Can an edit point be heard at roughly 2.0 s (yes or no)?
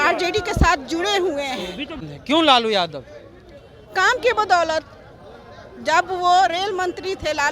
yes